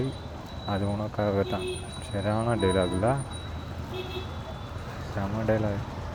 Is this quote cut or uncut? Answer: uncut